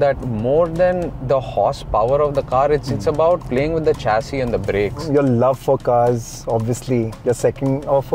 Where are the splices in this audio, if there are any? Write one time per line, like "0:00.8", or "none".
0:03.5
0:05.0
0:07.1